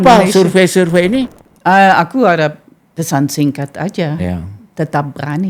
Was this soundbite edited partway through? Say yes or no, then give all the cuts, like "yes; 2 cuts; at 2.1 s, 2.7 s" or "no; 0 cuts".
yes; 1 cut; at 1.3 s